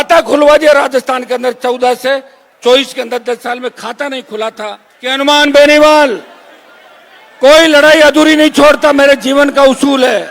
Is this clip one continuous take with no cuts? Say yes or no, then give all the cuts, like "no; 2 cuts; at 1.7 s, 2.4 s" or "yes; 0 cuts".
no; 1 cut; at 5.1 s